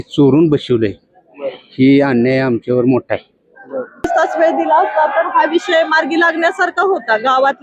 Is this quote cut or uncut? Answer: cut